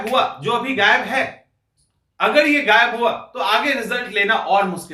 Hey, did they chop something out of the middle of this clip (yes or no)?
no